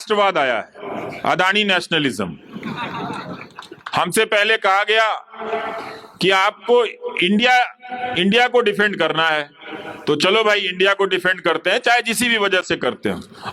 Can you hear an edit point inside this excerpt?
no; 0 cuts

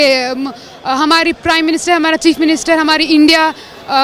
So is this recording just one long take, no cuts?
yes; 0 cuts

